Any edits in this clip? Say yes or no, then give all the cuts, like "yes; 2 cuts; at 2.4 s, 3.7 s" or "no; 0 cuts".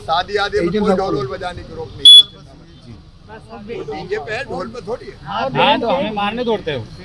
no; 0 cuts